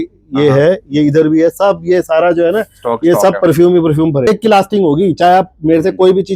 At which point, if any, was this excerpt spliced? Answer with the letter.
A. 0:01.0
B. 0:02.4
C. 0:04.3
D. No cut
C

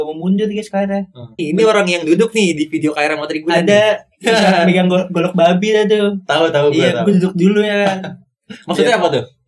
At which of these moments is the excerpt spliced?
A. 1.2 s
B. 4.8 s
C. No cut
A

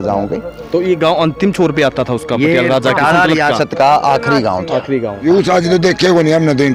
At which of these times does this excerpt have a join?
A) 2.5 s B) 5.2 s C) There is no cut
B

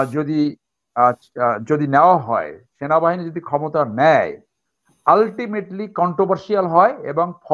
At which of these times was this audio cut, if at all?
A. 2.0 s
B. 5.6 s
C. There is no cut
C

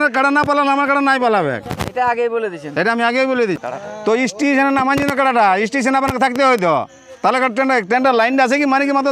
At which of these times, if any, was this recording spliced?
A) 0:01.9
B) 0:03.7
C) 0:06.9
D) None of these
B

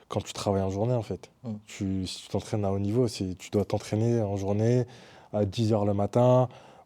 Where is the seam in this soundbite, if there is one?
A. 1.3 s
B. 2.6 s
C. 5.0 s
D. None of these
D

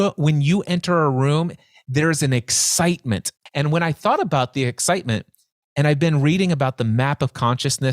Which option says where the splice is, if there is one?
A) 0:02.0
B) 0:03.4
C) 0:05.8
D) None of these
B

